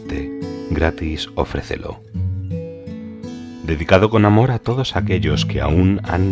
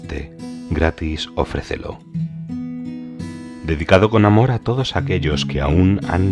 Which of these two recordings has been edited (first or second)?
first